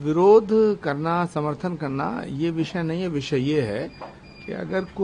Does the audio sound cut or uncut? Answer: uncut